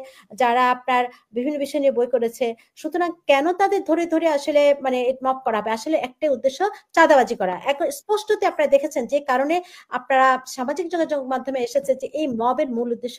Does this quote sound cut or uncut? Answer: uncut